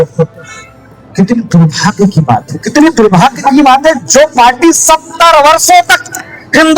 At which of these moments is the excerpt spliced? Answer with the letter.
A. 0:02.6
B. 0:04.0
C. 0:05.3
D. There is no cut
A